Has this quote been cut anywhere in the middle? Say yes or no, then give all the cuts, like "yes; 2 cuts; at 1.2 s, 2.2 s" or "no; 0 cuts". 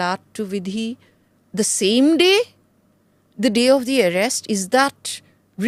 no; 0 cuts